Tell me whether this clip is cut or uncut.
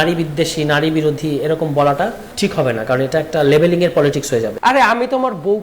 cut